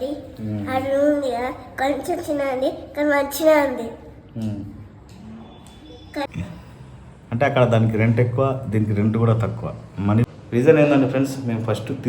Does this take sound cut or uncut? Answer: cut